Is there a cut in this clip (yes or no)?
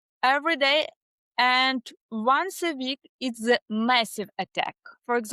no